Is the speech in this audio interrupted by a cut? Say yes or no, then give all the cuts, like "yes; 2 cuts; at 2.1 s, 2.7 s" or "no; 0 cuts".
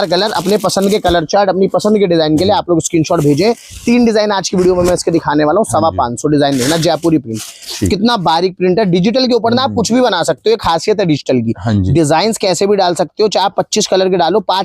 no; 0 cuts